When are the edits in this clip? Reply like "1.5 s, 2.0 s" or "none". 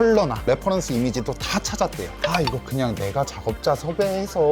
2.1 s

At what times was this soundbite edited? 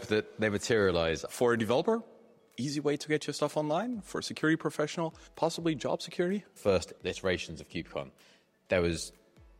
1.2 s, 6.6 s

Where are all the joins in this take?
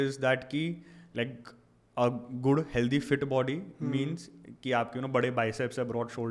none

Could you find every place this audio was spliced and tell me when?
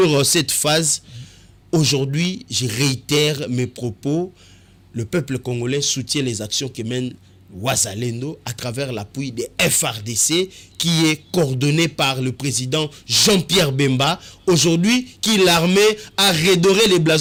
none

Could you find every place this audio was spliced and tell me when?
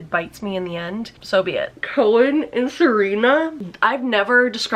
1.8 s

